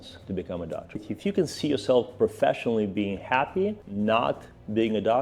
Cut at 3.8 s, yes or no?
no